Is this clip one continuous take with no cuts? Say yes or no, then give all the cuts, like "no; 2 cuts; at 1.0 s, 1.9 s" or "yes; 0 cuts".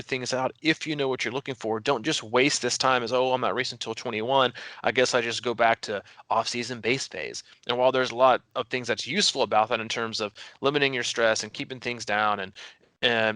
no; 1 cut; at 8.5 s